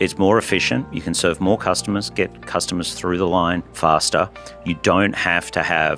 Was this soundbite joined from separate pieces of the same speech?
yes; 2 cuts; at 0.9 s, 3.7 s

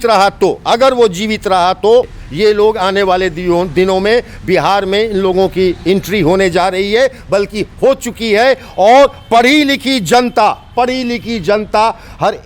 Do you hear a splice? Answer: yes; 1 cut; at 2.2 s

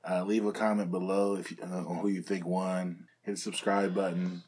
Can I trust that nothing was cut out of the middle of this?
no; 1 cut; at 3.1 s

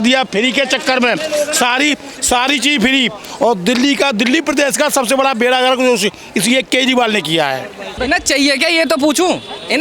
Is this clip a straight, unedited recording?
no; 1 cut; at 8.0 s

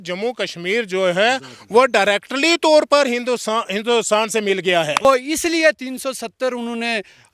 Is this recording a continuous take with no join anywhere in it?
no; 1 cut; at 5.0 s

